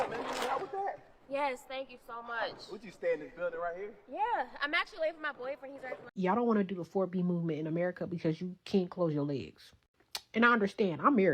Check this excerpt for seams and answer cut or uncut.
cut